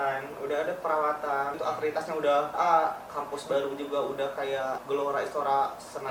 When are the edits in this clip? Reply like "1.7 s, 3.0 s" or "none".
1.6 s, 2.5 s, 4.8 s